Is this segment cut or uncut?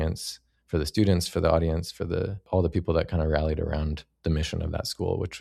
uncut